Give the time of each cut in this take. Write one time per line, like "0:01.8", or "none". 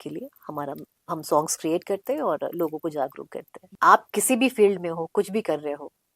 0:03.6